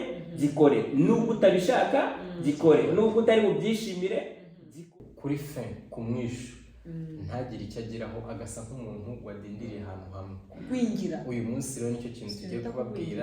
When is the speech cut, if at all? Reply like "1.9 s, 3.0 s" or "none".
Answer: 4.7 s